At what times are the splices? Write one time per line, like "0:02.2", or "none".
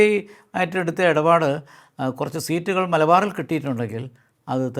none